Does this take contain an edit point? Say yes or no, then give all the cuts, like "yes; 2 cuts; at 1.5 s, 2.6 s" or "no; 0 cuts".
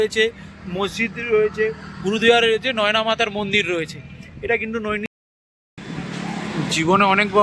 yes; 1 cut; at 5.1 s